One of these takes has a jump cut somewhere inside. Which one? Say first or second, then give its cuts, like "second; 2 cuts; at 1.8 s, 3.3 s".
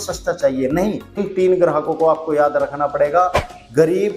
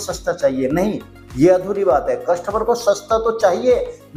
first; 1 cut; at 1.2 s